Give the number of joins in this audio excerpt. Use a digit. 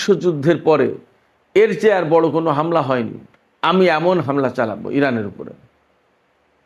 0